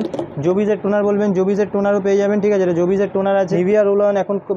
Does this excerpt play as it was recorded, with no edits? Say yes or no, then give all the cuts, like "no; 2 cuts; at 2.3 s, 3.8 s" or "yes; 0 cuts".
no; 1 cut; at 3.5 s